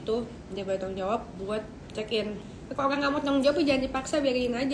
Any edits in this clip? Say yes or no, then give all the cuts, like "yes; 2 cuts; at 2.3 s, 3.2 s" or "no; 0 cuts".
yes; 1 cut; at 2.5 s